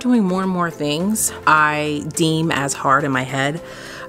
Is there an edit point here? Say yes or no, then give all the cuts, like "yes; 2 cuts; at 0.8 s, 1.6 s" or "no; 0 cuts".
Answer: yes; 1 cut; at 1.3 s